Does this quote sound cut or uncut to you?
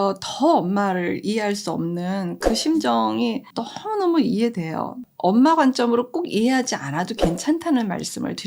cut